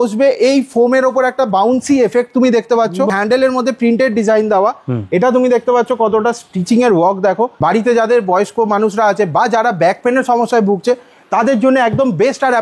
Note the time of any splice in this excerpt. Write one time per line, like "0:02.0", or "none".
0:03.1
0:07.5